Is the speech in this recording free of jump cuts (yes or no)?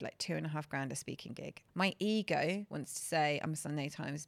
no